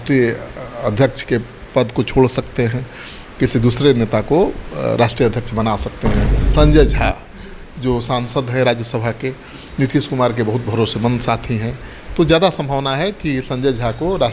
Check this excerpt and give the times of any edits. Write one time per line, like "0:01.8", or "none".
0:06.4